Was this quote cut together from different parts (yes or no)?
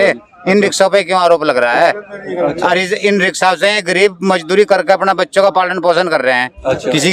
no